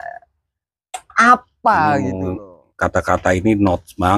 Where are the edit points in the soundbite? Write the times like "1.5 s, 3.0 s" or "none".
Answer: 2.3 s